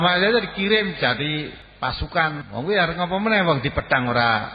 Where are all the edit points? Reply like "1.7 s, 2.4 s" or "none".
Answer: 1.6 s, 2.4 s